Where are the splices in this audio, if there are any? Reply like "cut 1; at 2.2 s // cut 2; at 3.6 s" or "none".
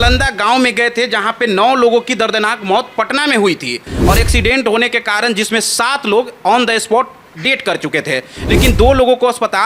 cut 1; at 3.9 s